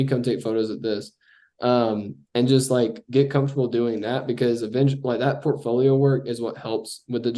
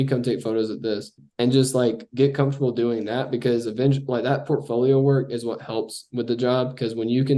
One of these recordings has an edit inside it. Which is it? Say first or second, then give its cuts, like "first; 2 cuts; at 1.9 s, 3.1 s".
second; 1 cut; at 1.2 s